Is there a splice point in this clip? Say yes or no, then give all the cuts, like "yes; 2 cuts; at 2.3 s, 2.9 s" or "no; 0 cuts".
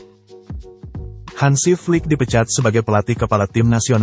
no; 0 cuts